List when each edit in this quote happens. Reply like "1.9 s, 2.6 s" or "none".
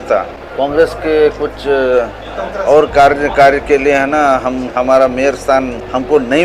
none